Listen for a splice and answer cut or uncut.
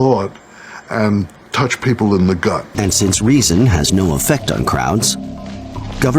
cut